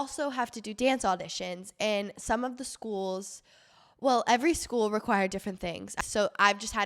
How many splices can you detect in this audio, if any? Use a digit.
1